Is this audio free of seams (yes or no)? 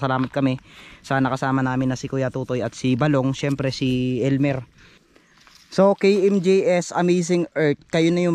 no